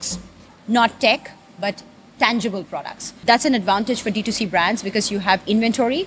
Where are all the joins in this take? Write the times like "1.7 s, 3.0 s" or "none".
3.1 s